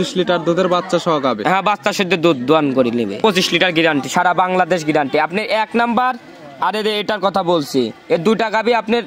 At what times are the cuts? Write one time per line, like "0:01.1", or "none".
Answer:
0:03.2